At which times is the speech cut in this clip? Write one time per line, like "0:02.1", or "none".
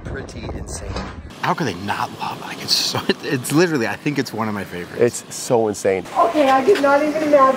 0:01.2
0:06.1

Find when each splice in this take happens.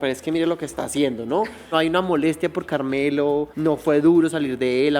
0:01.7
0:03.5

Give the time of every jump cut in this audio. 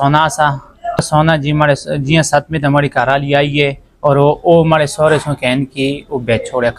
0:01.0

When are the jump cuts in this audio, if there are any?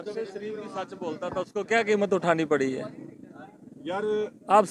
none

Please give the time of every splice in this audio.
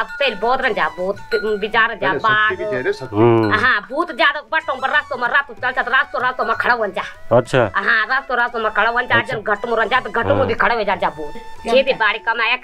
0:11.5

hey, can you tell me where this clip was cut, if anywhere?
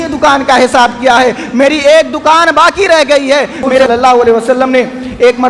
0:03.9

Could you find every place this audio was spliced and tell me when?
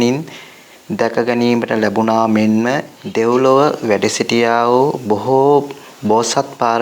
0:03.0

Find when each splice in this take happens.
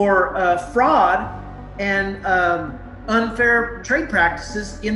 0:03.8

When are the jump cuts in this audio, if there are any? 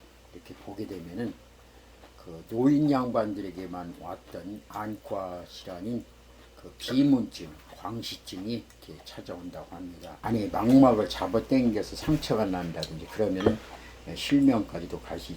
0:10.2

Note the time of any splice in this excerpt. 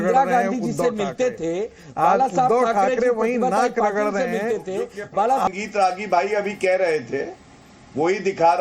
0:05.5

